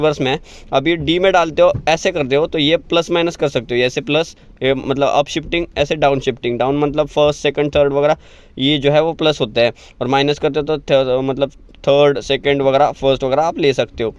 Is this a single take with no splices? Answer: yes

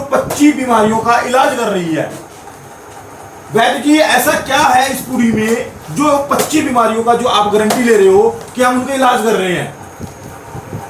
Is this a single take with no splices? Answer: yes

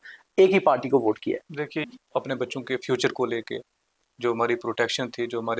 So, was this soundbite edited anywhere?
yes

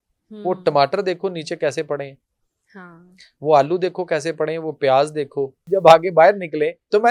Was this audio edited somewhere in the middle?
yes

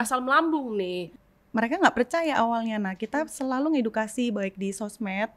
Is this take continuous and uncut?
no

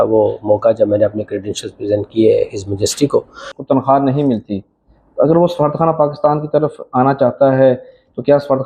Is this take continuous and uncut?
no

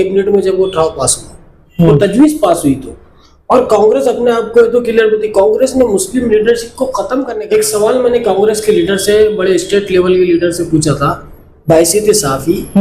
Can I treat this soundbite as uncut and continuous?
no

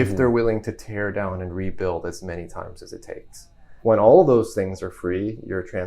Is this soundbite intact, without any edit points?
no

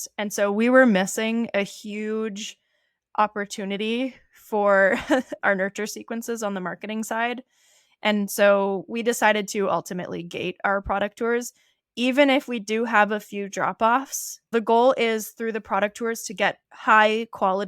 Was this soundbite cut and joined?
yes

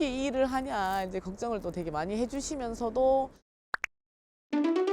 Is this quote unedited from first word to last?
no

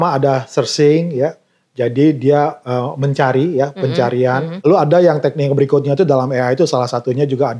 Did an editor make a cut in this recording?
yes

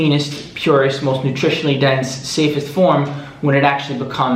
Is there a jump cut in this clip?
no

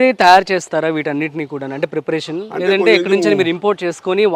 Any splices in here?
no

